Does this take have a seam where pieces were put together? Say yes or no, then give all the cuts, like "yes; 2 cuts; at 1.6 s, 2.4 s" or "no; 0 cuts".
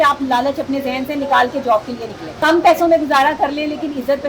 yes; 1 cut; at 2.4 s